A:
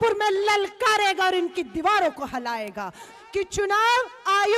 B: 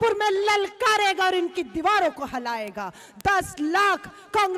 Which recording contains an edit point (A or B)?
A